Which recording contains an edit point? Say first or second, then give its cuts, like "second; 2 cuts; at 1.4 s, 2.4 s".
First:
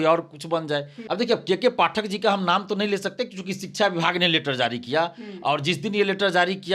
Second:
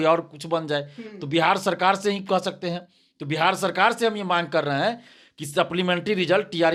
first; 1 cut; at 1.0 s